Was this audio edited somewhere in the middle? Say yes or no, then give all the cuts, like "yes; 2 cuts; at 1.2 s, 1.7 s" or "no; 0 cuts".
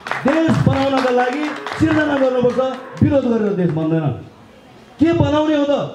no; 0 cuts